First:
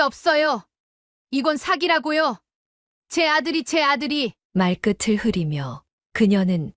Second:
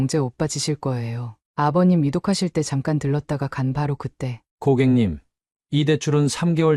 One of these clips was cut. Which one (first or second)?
second